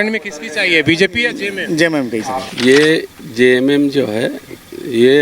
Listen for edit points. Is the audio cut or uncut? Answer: cut